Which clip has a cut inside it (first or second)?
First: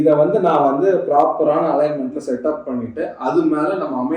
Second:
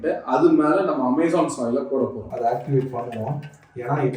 second